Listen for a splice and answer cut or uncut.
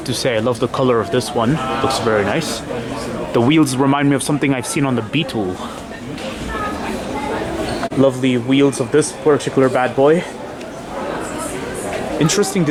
uncut